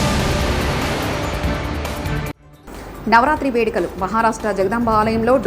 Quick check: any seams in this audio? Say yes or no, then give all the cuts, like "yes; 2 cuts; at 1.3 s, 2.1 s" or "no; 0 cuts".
yes; 1 cut; at 2.5 s